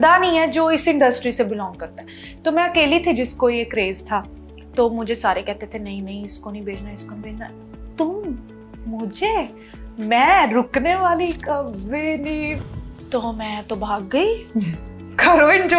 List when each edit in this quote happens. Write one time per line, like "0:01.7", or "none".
0:12.5